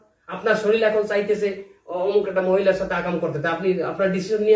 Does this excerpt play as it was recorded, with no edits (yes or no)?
yes